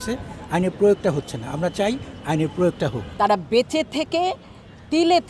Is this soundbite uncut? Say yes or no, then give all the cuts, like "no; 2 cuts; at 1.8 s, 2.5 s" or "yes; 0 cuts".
no; 1 cut; at 3.0 s